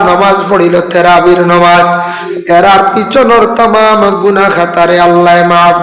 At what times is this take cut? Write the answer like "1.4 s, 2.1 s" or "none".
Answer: 2.2 s